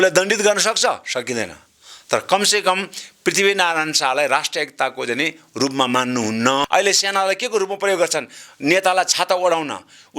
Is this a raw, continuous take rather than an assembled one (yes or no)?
no